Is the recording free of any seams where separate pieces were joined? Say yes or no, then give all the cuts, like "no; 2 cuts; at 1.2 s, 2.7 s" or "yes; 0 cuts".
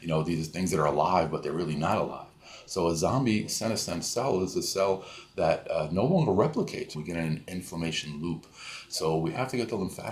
no; 1 cut; at 6.9 s